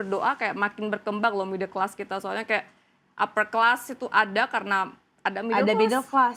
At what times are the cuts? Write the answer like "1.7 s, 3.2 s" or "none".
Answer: none